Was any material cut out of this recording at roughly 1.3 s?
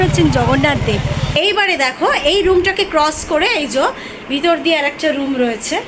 yes; 1 cut; at 1.3 s

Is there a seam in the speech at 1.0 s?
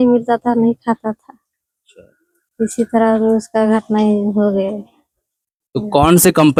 no; 0 cuts

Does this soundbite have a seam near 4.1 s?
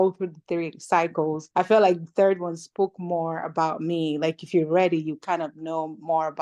no; 1 cut; at 1.4 s

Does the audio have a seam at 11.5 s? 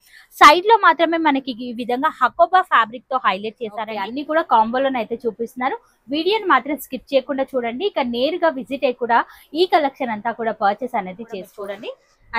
yes; 2 cuts; at 4.1 s, 11.5 s

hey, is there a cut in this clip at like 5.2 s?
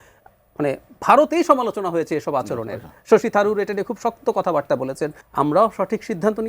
yes; 1 cut; at 5.2 s

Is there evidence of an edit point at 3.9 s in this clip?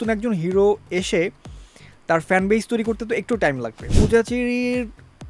yes; 1 cut; at 3.9 s

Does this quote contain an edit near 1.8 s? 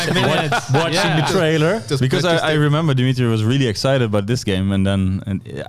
no; 0 cuts

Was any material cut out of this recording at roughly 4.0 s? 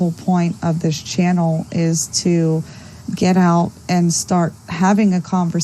yes; 1 cut; at 4.0 s

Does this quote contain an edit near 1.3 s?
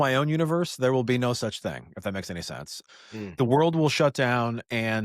no; 1 cut; at 2.8 s

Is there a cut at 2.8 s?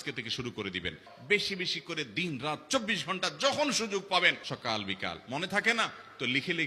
no; 2 cuts; at 1.1 s, 4.5 s

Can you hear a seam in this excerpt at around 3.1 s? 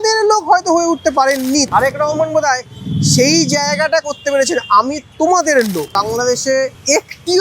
no; 3 cuts; at 1.7 s, 5.0 s, 6.4 s

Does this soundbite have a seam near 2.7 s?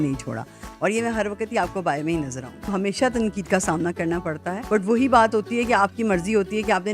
yes; 2 cuts; at 2.7 s, 4.5 s

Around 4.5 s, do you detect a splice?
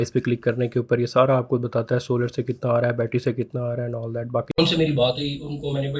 yes; 1 cut; at 4.5 s

